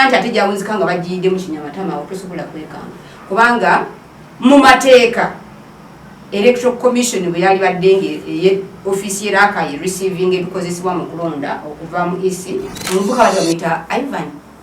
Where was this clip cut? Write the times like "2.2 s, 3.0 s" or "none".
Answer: 12.7 s